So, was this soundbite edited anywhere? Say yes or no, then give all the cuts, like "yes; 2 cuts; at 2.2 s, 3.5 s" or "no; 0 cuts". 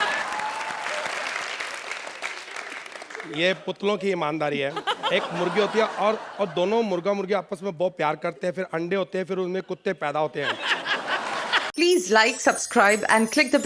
yes; 1 cut; at 11.6 s